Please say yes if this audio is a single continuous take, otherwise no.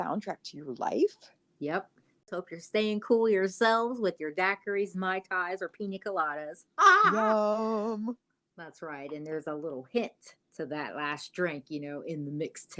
no